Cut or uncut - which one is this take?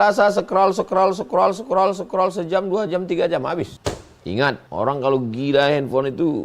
cut